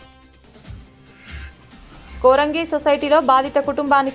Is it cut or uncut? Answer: cut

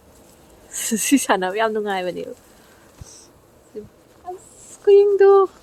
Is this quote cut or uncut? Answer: uncut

